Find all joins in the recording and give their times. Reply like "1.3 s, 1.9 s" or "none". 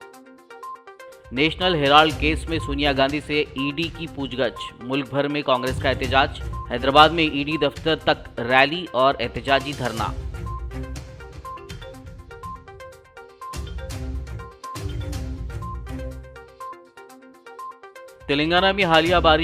1.0 s